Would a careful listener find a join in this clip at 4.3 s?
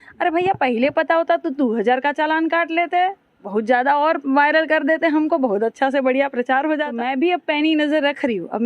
no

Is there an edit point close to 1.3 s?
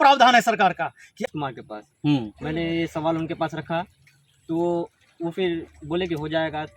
yes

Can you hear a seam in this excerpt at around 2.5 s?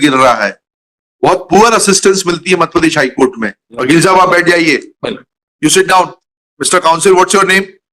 no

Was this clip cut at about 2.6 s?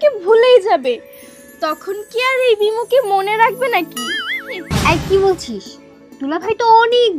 no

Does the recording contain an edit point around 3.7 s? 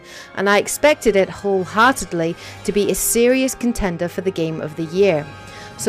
no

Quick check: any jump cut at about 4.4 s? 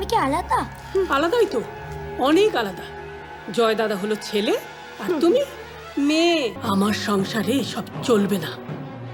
no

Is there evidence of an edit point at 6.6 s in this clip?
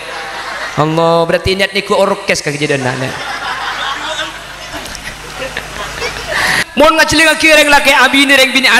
yes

